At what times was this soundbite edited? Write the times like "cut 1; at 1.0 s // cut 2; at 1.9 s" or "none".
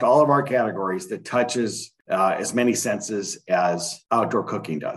cut 1; at 1.9 s // cut 2; at 3.9 s